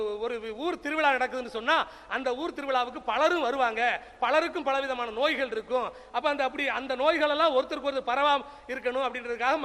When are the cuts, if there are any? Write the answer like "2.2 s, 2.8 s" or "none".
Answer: none